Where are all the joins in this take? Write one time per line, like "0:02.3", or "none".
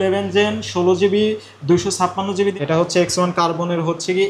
0:02.6